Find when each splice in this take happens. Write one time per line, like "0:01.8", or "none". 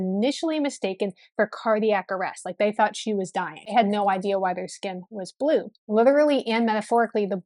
0:03.6
0:05.9